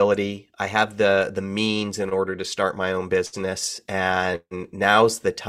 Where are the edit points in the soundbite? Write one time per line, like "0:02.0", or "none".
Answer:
none